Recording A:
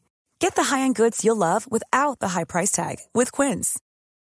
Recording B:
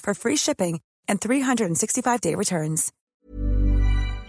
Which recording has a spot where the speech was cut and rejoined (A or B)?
B